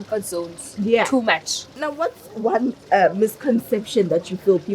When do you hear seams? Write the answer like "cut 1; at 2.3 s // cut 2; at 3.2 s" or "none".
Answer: cut 1; at 1.9 s

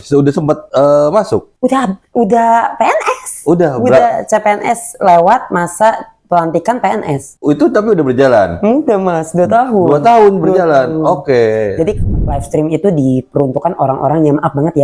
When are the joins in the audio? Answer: cut 1; at 12.0 s

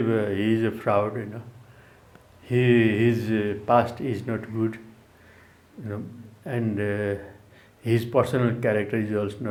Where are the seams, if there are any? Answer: none

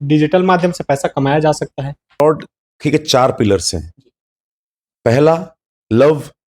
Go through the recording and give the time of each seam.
cut 1; at 2.2 s

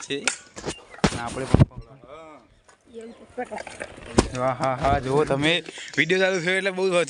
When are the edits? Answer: none

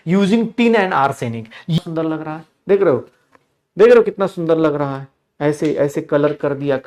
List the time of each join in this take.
cut 1; at 1.8 s

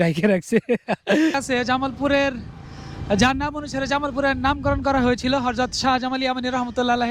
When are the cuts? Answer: cut 1; at 1.4 s

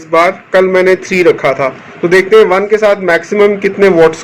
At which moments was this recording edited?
none

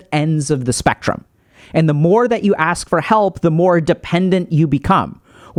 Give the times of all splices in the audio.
none

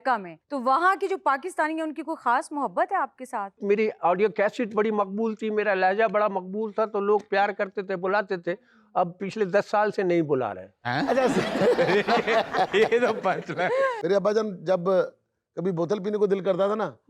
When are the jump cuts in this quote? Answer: cut 1; at 3.6 s // cut 2; at 13.9 s

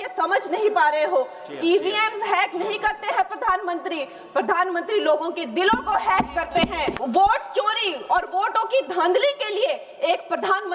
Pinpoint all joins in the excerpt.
cut 1; at 7.0 s

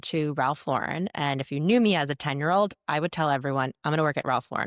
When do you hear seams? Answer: none

